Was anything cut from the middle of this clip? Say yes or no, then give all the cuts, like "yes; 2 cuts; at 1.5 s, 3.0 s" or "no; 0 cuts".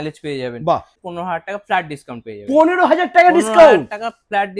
yes; 1 cut; at 1.0 s